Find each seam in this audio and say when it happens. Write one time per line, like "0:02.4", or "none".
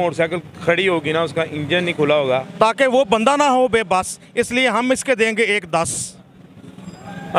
0:02.5